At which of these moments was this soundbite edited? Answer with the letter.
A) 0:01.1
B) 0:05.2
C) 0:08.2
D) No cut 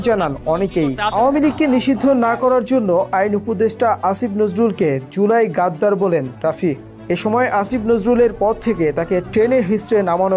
A